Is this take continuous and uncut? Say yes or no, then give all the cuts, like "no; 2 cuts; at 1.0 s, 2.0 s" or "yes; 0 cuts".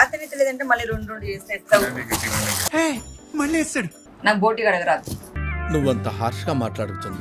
no; 1 cut; at 3.9 s